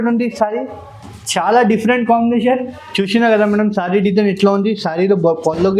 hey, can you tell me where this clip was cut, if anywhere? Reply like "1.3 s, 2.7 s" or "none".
2.7 s